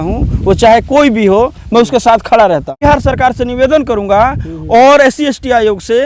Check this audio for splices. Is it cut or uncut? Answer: cut